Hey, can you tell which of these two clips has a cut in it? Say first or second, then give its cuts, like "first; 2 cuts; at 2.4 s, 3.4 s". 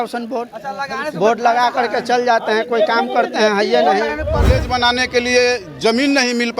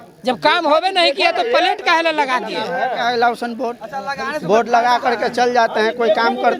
first; 1 cut; at 4.6 s